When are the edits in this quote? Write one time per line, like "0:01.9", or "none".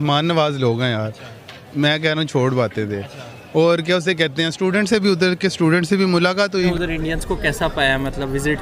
0:06.7